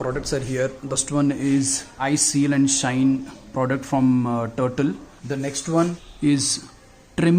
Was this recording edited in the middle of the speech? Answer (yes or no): yes